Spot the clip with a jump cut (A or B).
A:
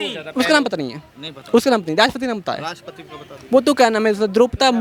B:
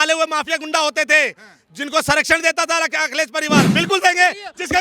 B